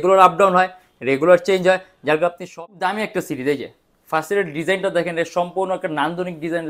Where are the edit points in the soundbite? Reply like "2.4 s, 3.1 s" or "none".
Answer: 2.5 s